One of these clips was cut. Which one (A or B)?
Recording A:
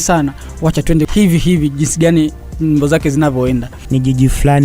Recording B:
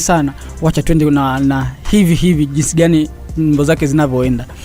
A